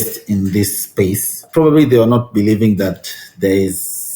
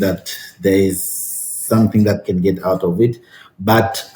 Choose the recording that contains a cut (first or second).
first